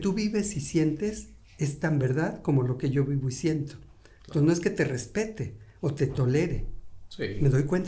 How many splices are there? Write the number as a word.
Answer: zero